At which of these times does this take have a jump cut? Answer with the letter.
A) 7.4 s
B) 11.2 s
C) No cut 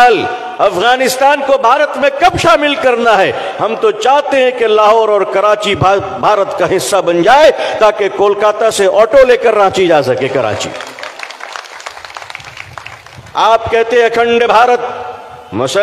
C